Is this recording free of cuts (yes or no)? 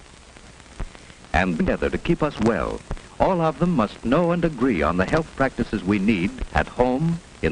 yes